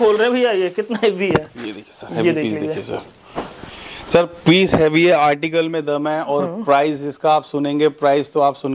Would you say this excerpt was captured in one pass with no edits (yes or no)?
yes